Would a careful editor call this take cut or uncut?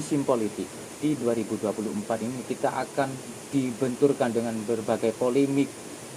cut